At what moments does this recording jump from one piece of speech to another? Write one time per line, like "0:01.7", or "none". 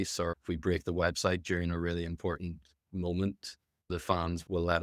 0:03.9